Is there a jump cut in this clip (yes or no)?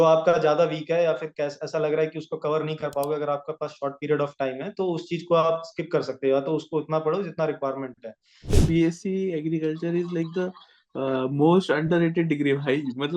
yes